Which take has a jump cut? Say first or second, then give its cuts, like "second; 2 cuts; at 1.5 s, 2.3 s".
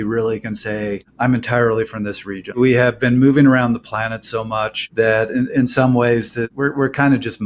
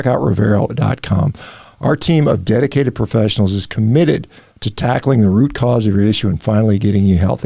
first; 4 cuts; at 1.0 s, 2.6 s, 4.8 s, 6.5 s